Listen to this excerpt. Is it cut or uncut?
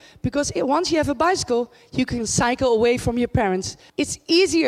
cut